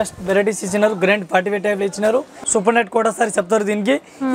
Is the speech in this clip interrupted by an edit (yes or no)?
yes